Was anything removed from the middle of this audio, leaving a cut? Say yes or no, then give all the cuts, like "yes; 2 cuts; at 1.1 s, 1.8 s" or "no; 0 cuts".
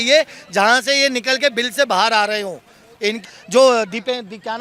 yes; 1 cut; at 3.3 s